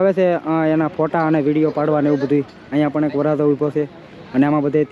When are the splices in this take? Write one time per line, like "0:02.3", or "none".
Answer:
none